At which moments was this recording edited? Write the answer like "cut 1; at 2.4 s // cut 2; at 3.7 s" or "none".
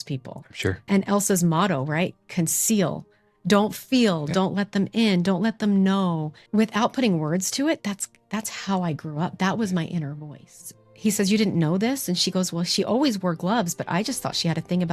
cut 1; at 0.9 s // cut 2; at 6.3 s // cut 3; at 10.8 s